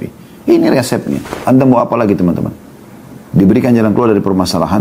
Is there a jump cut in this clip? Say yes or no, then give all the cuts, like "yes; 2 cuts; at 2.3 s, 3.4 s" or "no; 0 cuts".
yes; 1 cut; at 1.3 s